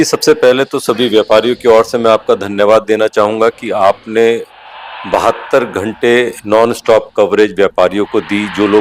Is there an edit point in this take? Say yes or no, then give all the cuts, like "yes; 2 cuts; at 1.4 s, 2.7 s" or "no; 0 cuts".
no; 0 cuts